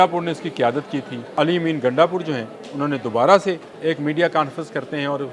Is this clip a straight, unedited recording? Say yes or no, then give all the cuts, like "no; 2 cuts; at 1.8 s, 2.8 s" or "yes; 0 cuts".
no; 2 cuts; at 1.3 s, 3.7 s